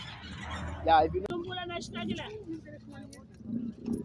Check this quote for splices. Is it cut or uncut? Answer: cut